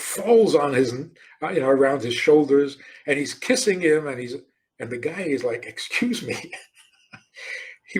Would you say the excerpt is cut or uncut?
uncut